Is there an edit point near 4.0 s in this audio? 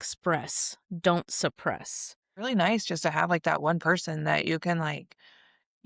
no; 1 cut; at 2.5 s

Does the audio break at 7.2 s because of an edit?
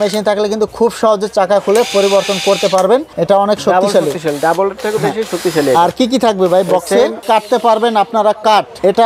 yes; 2 cuts; at 3.1 s, 7.2 s

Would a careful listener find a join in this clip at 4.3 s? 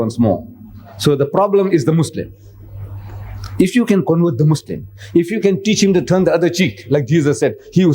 yes; 2 cuts; at 4.3 s, 6.8 s

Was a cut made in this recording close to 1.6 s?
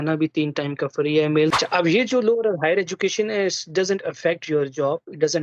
yes; 1 cut; at 1.6 s

